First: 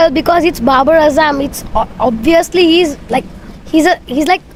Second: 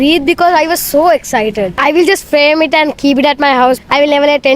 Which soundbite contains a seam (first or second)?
second